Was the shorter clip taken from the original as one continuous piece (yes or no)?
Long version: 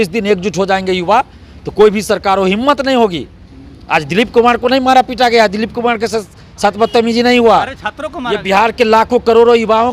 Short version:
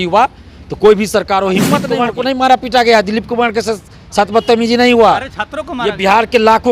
no